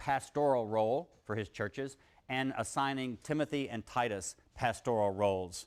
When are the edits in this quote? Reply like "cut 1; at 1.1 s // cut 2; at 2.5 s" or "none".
cut 1; at 2.9 s